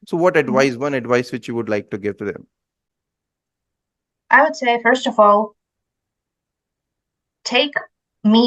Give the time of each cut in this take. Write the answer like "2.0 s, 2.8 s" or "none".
none